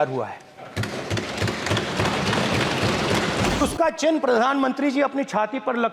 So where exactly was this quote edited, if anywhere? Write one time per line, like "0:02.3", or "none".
0:03.6